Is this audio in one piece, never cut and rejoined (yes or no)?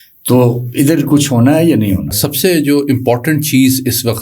no